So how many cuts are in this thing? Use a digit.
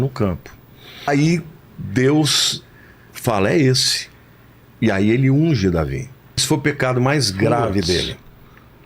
2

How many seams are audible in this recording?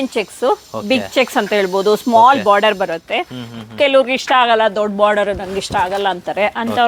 0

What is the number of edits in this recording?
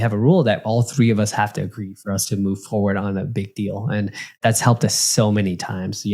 0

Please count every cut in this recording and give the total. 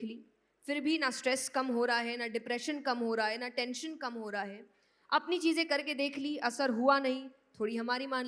0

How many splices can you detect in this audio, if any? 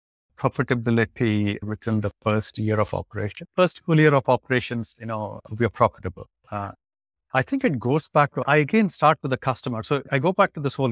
3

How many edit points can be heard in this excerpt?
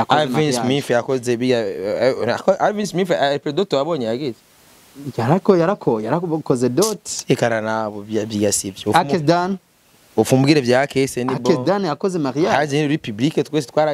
0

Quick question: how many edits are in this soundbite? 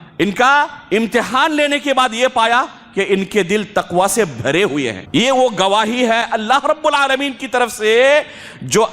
1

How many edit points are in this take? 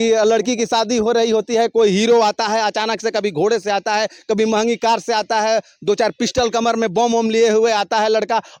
0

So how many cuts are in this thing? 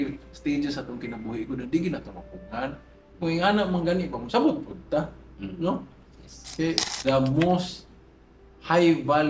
1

